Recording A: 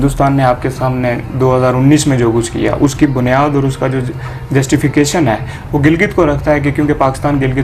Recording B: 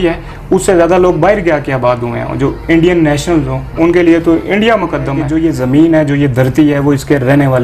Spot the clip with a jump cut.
B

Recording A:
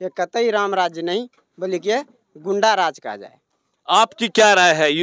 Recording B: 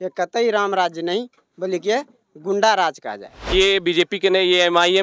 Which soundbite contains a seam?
B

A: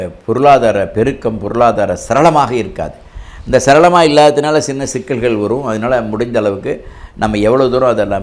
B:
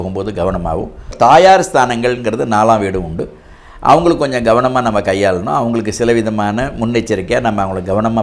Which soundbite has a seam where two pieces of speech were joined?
B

